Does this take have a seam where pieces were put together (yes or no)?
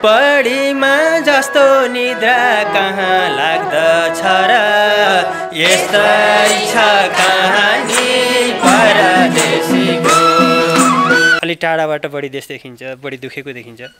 yes